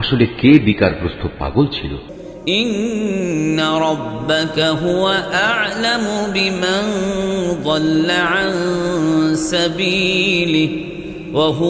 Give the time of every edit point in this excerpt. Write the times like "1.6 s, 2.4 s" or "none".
2.0 s